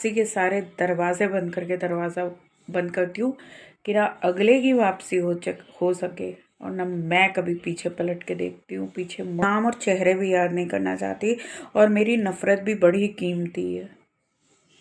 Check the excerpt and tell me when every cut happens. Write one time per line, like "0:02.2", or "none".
0:09.4